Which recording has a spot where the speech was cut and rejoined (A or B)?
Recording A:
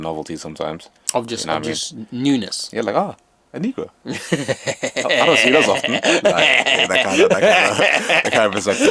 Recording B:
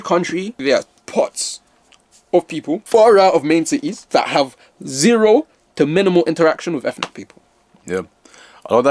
B